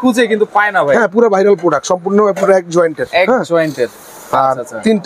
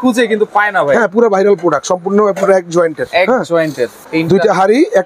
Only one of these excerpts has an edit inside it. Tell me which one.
second; 1 cut; at 4.0 s

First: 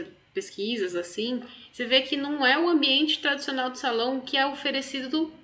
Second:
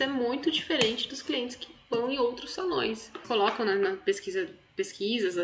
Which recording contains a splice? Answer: second; 1 cut; at 3.2 s

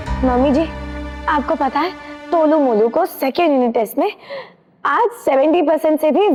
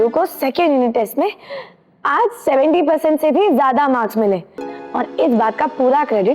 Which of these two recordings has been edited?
second; 1 cut; at 4.6 s

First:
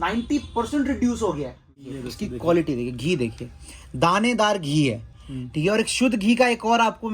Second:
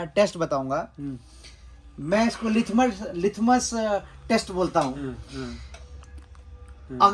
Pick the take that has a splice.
first; 1 cut; at 2.0 s

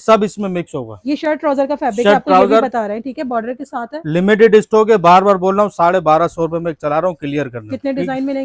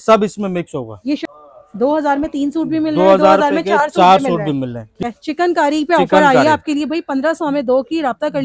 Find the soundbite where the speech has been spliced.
second; 2 cuts; at 1.2 s, 5.0 s

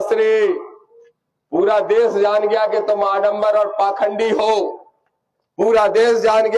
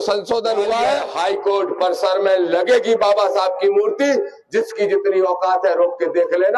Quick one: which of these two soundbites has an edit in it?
second; 1 cut; at 1.1 s

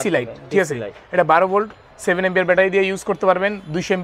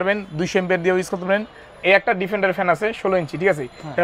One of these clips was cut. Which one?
second; 1 cut; at 1.7 s

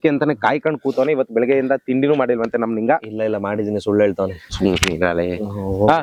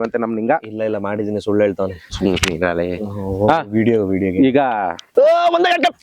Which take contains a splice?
second; 1 cut; at 5.0 s

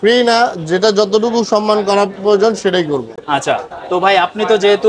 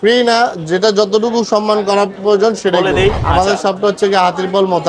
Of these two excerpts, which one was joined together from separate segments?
second; 1 cut; at 2.7 s

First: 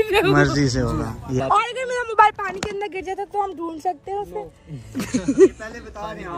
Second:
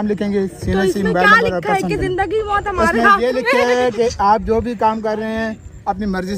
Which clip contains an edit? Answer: first; 1 cut; at 1.4 s

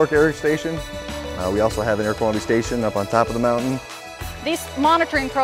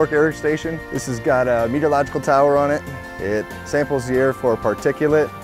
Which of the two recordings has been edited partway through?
first; 2 cuts; at 1.0 s, 4.0 s

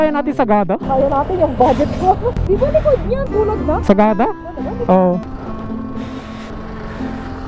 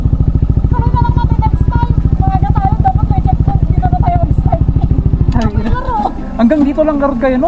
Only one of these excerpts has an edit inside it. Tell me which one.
first; 2 cuts; at 2.3 s, 5.2 s

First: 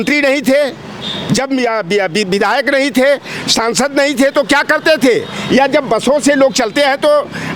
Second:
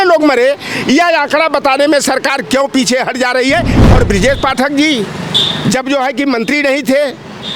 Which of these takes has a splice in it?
second; 1 cut; at 3.8 s

